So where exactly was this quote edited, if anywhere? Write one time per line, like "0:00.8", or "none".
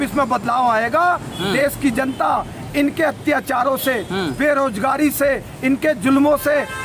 none